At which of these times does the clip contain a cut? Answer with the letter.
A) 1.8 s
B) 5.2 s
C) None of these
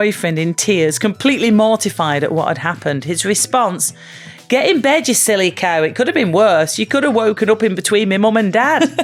C